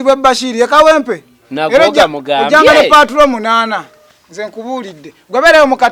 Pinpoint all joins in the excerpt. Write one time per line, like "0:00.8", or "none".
none